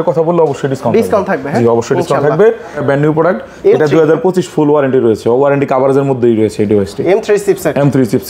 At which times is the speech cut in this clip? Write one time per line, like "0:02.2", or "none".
0:02.8